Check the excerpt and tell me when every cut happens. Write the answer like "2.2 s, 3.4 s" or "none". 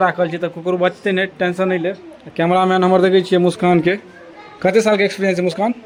none

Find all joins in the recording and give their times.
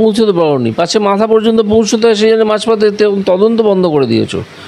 none

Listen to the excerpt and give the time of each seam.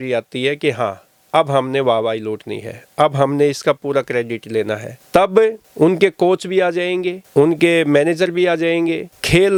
none

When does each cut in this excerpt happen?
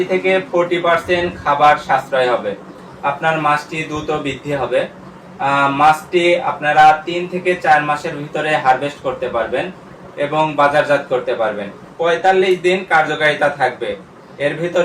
2.9 s, 11.8 s

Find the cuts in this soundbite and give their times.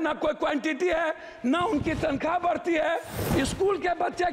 3.1 s

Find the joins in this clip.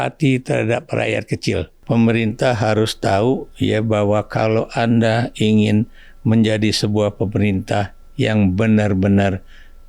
1.8 s

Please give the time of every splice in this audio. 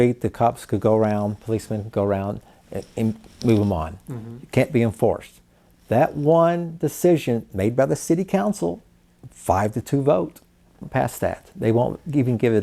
10.8 s

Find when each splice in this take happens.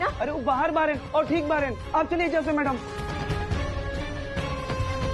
2.9 s

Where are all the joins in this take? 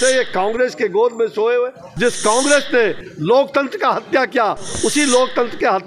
1.8 s

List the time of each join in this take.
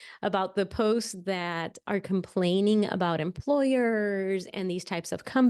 none

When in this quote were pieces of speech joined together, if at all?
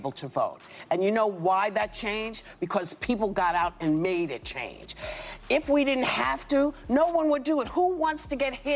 1.0 s

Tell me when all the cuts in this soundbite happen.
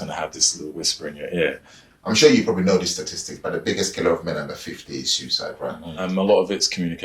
1.9 s, 5.9 s

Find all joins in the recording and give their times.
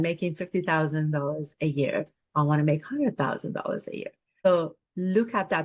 4.5 s

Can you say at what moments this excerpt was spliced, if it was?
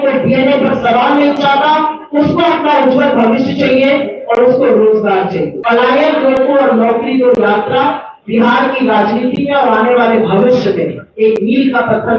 5.5 s

